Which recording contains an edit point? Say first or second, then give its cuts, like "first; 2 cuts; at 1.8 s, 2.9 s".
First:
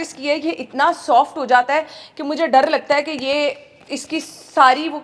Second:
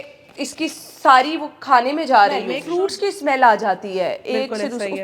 second; 1 cut; at 2.6 s